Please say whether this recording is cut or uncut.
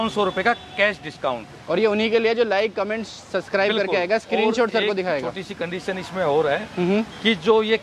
uncut